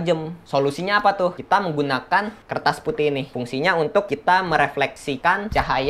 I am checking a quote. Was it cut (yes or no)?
yes